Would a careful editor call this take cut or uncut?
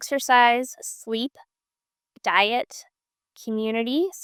uncut